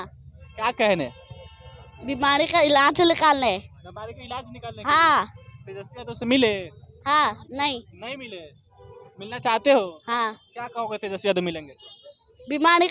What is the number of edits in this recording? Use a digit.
0